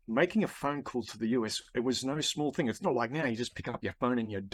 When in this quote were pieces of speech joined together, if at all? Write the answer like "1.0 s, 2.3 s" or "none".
none